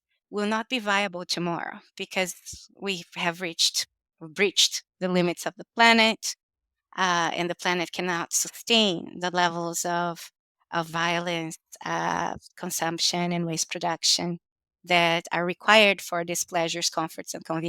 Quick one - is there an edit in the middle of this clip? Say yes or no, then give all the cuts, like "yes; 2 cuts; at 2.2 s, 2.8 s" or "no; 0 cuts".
no; 0 cuts